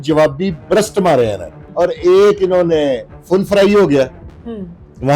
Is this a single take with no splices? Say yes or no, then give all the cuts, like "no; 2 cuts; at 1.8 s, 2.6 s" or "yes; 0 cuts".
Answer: no; 1 cut; at 1.6 s